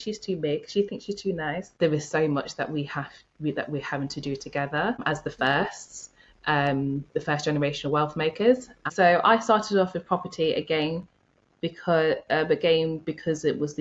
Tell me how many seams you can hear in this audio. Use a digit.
2